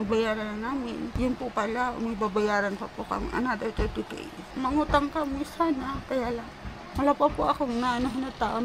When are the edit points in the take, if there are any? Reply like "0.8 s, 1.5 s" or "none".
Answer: 1.1 s, 4.4 s, 6.8 s